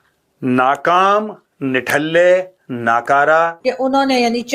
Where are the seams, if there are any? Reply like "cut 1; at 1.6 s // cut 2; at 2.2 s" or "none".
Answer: cut 1; at 3.6 s